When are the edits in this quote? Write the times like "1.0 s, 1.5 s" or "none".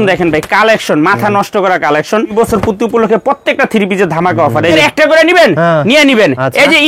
2.3 s, 4.8 s